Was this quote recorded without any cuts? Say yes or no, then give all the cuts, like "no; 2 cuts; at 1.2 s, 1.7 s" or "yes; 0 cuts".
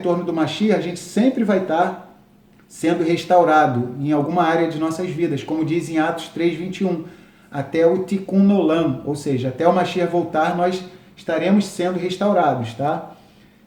yes; 0 cuts